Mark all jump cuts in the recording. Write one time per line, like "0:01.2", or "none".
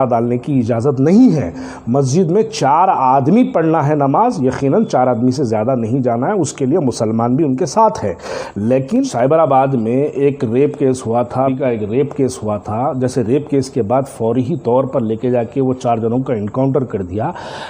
0:09.1
0:11.5